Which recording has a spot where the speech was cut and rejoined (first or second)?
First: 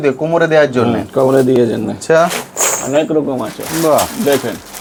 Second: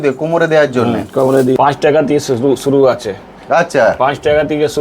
second